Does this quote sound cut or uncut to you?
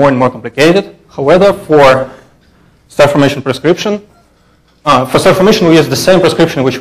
uncut